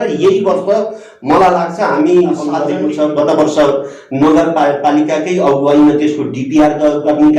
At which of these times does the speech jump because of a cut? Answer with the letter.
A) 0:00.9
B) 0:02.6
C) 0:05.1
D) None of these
B